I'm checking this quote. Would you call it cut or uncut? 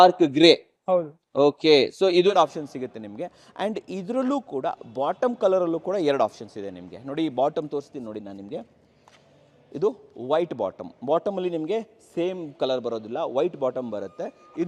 cut